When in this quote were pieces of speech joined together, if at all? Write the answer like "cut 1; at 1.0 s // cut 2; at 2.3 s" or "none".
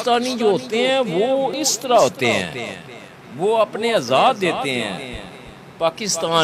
cut 1; at 1.7 s